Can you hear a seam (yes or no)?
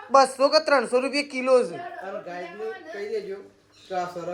no